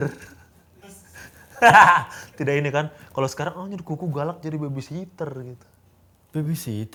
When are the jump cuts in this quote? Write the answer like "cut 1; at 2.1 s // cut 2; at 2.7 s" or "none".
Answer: none